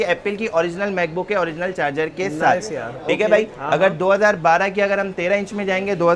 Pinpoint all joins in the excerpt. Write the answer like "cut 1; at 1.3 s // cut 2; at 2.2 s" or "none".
none